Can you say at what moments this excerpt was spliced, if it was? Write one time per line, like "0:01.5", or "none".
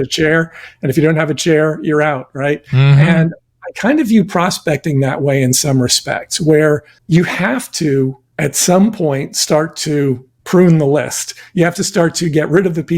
0:06.9
0:08.2
0:10.3